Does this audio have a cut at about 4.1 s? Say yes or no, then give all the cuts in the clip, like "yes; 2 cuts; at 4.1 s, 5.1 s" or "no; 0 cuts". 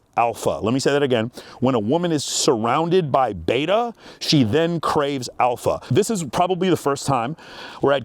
no; 1 cut; at 5.8 s